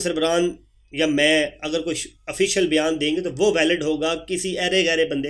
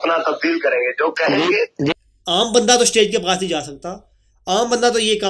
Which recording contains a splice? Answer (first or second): second